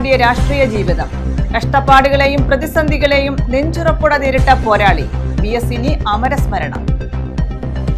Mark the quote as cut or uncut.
uncut